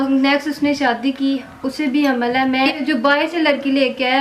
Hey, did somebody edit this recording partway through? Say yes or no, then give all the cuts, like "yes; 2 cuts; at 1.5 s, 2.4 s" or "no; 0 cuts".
yes; 1 cut; at 2.8 s